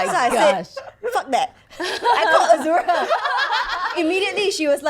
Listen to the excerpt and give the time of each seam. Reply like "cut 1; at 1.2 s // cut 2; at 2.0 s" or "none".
cut 1; at 3.9 s